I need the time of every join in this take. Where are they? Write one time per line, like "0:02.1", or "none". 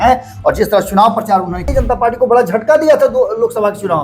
0:01.7